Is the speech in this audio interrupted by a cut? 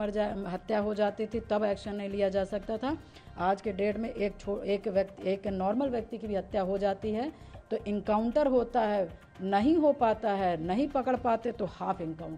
no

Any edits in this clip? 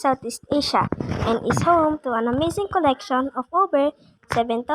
yes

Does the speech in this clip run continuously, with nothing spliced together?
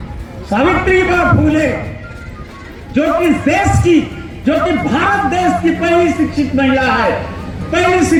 yes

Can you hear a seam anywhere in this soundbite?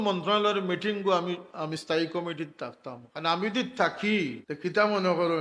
yes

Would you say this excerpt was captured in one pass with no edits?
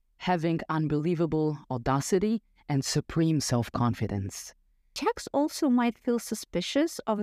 no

